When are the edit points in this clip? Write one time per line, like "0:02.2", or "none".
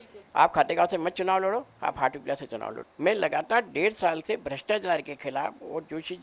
0:02.8